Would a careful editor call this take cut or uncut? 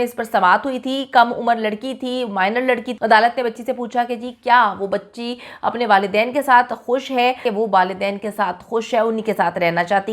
cut